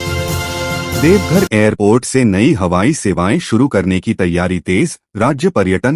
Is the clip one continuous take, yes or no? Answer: no